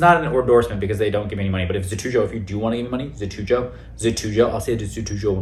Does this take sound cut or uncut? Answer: uncut